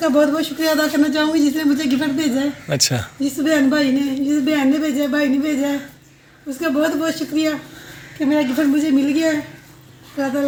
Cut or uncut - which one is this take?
uncut